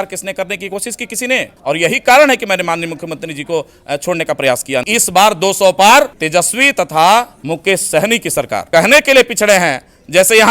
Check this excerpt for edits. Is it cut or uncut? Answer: cut